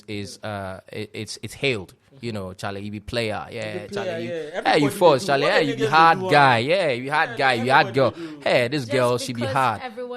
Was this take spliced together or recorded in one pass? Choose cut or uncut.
uncut